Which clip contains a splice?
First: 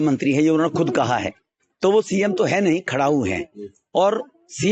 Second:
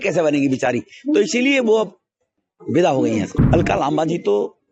second; 1 cut; at 3.3 s

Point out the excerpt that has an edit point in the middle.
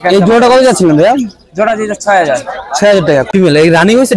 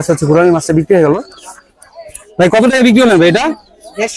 first; 1 cut; at 3.3 s

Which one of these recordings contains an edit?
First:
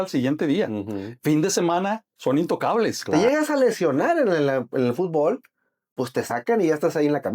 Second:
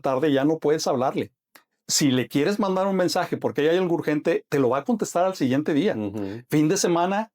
first; 1 cut; at 3.0 s

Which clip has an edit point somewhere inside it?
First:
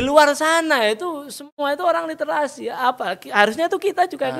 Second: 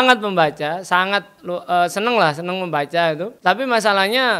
second; 1 cut; at 3.3 s

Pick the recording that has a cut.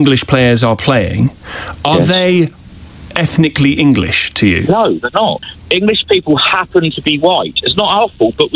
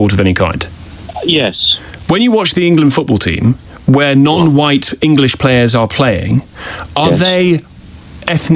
first; 1 cut; at 5.4 s

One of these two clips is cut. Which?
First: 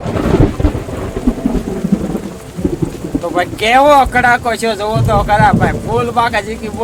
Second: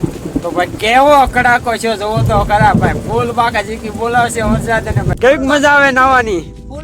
second; 1 cut; at 5.1 s

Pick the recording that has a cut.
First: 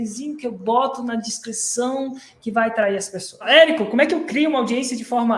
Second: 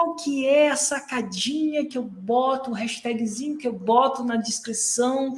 first; 1 cut; at 3.5 s

